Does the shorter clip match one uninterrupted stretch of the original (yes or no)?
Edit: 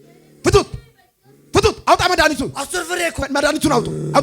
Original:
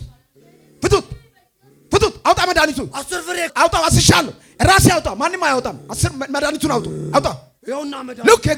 no